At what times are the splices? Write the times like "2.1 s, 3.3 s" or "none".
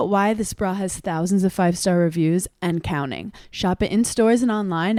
none